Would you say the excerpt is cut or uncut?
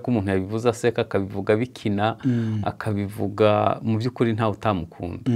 uncut